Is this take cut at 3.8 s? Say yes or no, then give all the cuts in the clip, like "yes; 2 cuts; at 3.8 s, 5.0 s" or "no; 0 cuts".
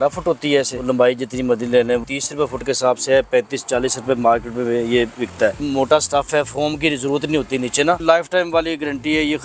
no; 4 cuts; at 0.8 s, 2.1 s, 5.6 s, 8.0 s